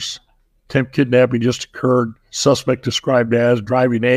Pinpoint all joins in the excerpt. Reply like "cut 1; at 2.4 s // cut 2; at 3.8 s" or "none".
cut 1; at 2.2 s